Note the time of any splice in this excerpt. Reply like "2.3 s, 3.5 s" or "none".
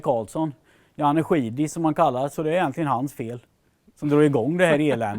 2.3 s

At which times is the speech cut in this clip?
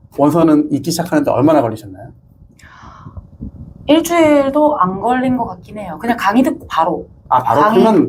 none

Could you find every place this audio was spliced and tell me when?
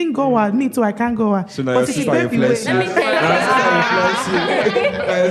none

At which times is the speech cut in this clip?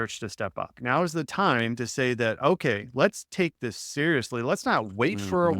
none

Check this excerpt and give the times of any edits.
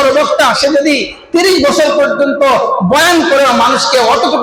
none

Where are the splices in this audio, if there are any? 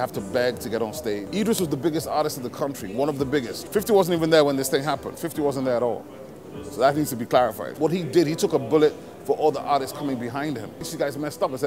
1.3 s, 3.6 s, 7.6 s, 10.9 s

